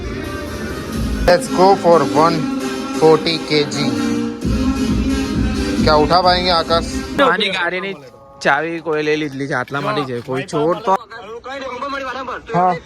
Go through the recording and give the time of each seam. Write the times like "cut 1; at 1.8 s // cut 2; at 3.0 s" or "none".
cut 1; at 1.2 s // cut 2; at 7.2 s // cut 3; at 11.0 s

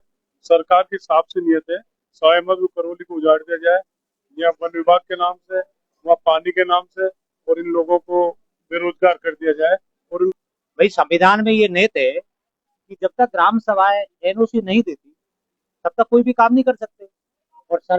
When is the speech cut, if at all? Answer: cut 1; at 10.3 s

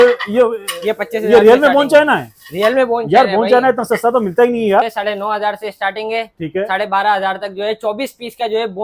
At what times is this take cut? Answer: cut 1; at 4.8 s

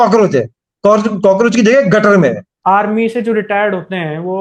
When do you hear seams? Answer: cut 1; at 2.5 s

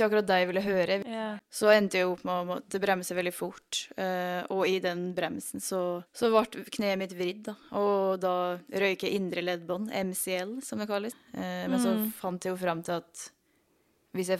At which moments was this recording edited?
cut 1; at 1.2 s // cut 2; at 6.1 s // cut 3; at 11.2 s

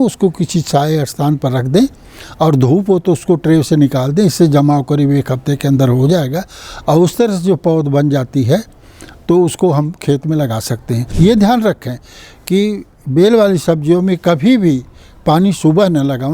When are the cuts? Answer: cut 1; at 11.0 s

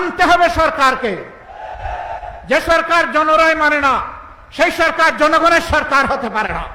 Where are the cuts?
none

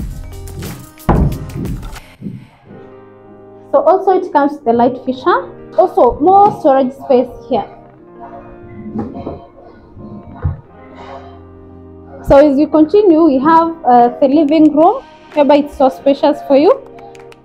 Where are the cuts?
cut 1; at 5.7 s

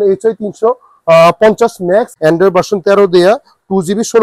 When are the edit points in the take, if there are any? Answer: cut 1; at 2.1 s

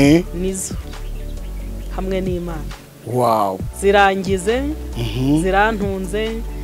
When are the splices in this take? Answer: none

